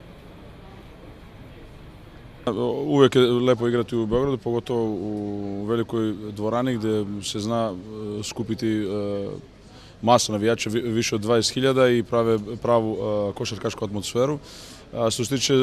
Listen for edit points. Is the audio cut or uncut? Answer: uncut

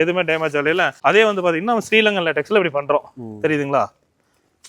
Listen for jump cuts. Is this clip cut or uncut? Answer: cut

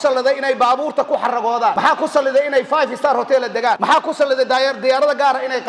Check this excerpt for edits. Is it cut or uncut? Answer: cut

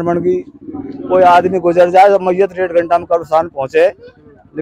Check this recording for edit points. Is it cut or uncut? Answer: uncut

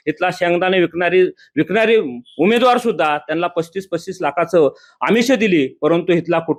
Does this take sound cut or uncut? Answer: uncut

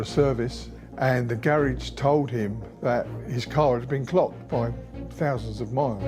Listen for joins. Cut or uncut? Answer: uncut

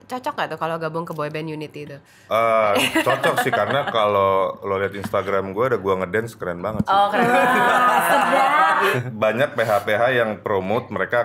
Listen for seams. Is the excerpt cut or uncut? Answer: cut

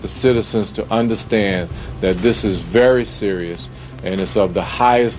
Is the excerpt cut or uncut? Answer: uncut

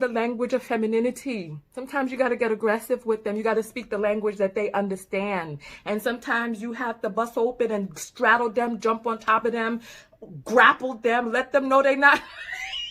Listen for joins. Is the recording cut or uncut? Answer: uncut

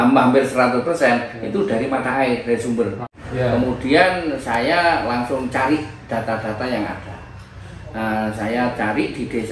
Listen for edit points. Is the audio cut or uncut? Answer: cut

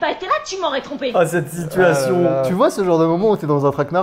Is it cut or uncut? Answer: cut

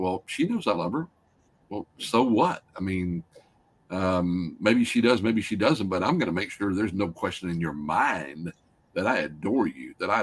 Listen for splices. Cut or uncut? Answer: uncut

